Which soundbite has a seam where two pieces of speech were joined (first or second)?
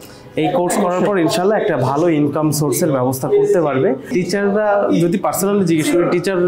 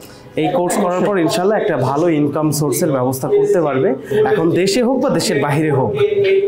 first